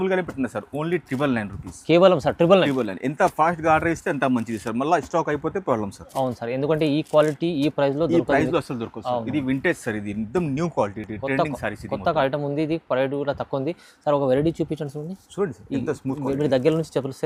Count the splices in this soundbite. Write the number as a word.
zero